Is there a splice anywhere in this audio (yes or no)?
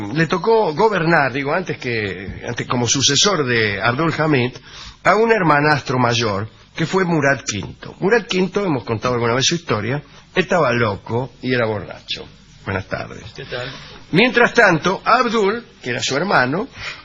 yes